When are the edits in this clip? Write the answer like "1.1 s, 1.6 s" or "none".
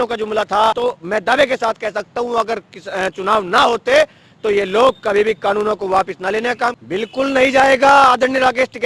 0.8 s, 6.7 s